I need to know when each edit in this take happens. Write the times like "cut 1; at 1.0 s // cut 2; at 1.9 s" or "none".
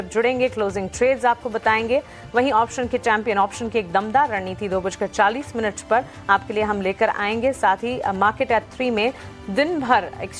cut 1; at 6.7 s